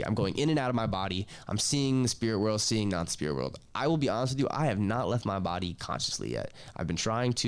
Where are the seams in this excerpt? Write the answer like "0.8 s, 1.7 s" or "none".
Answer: none